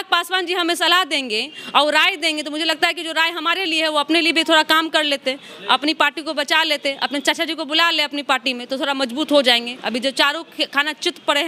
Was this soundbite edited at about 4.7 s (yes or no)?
no